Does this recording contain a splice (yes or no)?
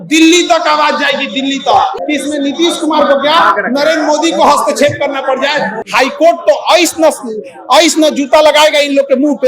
yes